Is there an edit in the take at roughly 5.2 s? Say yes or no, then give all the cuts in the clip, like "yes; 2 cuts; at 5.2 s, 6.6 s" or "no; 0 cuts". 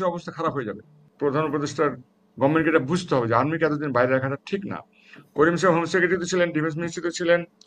no; 1 cut; at 1.1 s